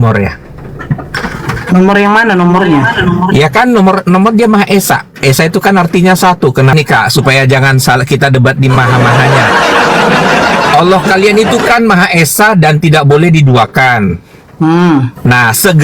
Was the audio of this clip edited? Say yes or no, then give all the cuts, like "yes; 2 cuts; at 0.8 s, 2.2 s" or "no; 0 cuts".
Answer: yes; 1 cut; at 6.7 s